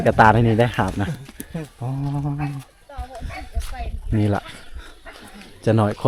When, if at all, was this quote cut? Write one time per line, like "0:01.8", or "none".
none